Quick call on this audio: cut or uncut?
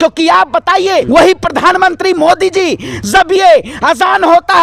cut